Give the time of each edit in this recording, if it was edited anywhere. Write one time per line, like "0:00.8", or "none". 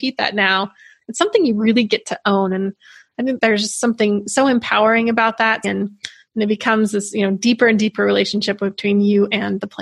0:05.7